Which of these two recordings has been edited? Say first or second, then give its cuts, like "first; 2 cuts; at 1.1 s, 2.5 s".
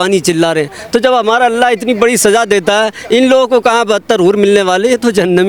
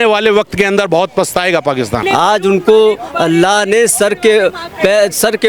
second; 1 cut; at 1.9 s